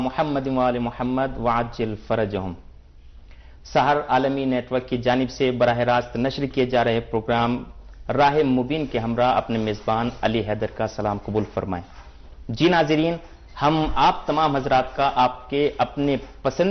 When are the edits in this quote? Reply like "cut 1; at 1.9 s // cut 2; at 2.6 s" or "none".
none